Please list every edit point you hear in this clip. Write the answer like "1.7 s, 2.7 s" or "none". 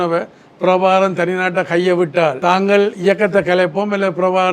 2.4 s